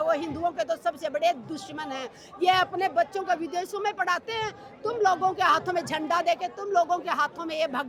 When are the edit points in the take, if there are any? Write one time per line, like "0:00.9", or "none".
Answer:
none